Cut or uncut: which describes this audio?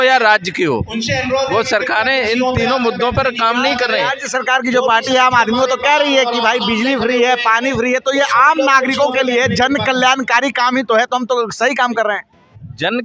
uncut